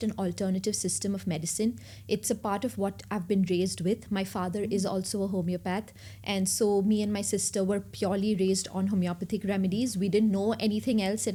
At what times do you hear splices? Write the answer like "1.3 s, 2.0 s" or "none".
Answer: none